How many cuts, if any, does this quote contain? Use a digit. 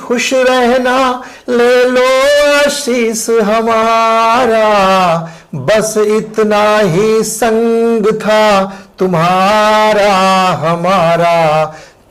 0